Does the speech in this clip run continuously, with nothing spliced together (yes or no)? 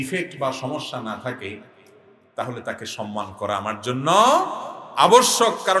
yes